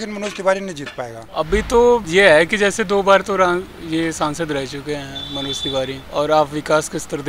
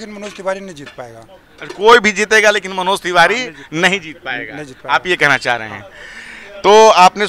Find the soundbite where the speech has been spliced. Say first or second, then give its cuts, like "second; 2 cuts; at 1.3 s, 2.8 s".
first; 3 cuts; at 1.2 s, 2.1 s, 6.0 s